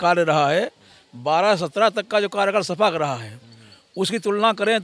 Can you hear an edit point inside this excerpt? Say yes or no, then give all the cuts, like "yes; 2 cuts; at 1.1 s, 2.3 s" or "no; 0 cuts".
no; 0 cuts